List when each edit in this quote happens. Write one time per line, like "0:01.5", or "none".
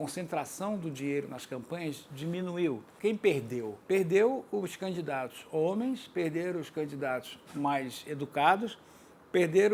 0:02.9
0:03.8